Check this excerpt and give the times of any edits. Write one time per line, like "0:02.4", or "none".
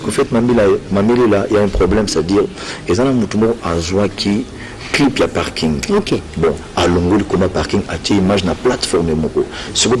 none